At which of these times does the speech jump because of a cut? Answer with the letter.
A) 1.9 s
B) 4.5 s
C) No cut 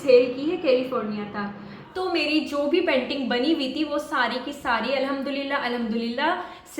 A